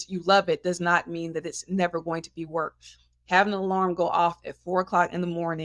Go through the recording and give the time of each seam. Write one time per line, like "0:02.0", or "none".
none